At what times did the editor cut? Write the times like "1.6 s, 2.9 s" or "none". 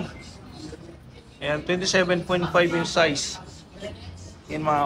none